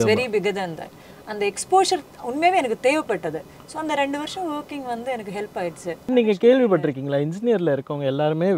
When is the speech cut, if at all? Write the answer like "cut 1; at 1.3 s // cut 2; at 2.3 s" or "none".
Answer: cut 1; at 6.1 s